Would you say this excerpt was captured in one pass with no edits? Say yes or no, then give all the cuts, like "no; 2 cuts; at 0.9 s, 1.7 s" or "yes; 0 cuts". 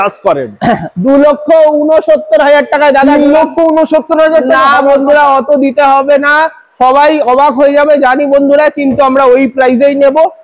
yes; 0 cuts